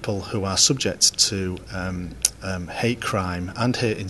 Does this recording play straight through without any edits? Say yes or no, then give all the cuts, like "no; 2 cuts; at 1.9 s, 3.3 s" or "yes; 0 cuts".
yes; 0 cuts